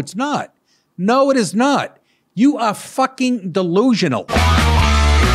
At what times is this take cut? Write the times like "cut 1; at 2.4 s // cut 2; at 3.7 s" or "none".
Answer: cut 1; at 4.3 s